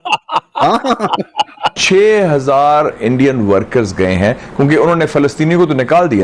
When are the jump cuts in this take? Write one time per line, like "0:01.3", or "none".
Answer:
0:01.8